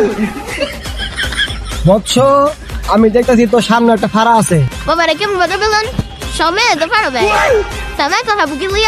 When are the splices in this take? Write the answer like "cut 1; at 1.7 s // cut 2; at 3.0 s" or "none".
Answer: cut 1; at 1.5 s